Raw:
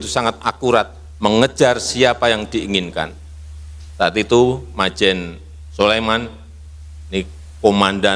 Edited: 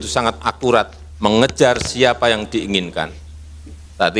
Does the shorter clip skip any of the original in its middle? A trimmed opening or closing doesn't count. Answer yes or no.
no